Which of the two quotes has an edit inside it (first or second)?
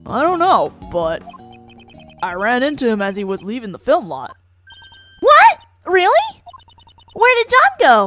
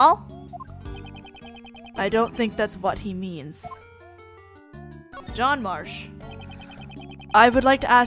second